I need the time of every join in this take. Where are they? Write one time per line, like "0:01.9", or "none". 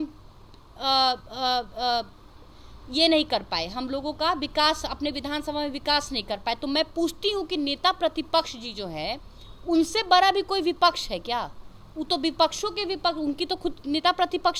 none